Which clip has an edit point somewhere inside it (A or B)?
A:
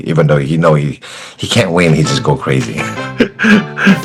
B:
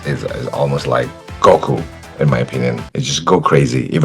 B